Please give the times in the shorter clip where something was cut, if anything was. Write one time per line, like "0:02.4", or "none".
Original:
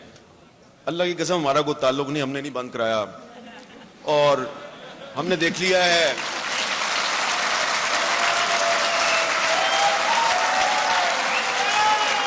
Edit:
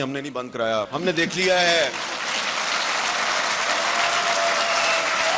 0:00.9